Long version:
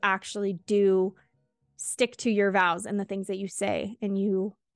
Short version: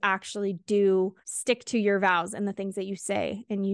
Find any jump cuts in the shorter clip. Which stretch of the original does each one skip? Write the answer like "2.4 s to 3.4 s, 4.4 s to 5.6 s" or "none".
1.3 s to 1.8 s